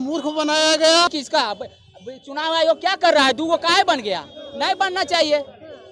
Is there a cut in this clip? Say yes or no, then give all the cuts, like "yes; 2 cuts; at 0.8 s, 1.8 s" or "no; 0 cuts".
yes; 1 cut; at 1.1 s